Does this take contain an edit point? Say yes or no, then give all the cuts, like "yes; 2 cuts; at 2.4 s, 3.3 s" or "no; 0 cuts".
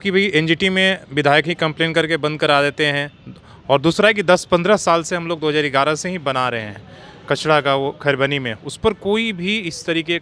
no; 0 cuts